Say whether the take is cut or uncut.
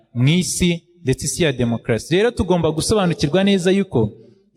uncut